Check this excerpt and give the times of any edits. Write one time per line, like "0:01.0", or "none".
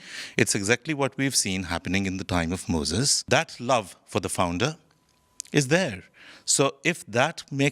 0:03.2

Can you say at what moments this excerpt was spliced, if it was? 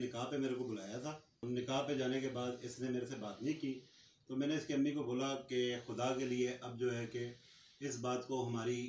0:01.4

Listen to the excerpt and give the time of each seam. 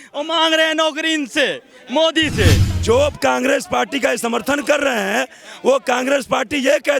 0:02.7

